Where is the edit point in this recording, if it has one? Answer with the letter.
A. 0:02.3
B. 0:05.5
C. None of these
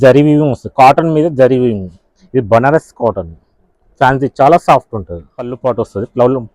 B